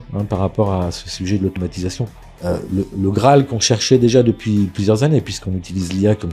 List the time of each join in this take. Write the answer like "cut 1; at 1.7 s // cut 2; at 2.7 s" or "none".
cut 1; at 2.0 s